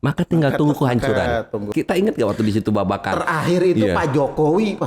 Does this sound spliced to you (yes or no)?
yes